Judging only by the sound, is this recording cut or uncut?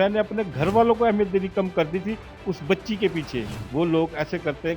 cut